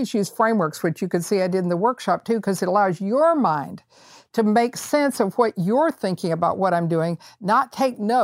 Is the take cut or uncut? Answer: uncut